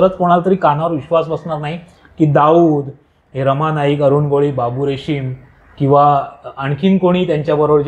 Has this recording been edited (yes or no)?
no